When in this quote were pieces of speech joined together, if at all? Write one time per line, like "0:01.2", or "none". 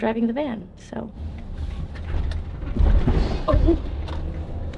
none